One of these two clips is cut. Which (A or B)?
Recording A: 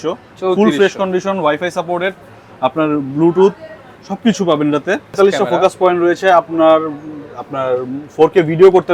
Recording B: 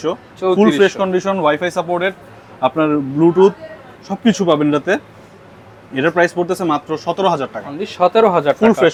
A